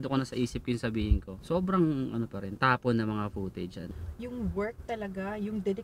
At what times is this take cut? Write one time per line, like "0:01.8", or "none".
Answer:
0:01.3
0:03.9